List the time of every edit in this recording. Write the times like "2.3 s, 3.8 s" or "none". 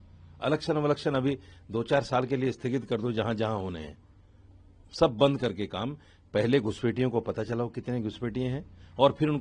none